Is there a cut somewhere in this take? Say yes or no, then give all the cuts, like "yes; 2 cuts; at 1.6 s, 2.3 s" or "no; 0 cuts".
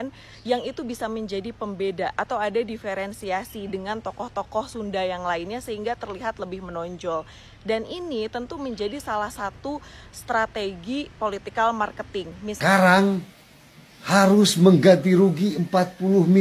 yes; 1 cut; at 12.6 s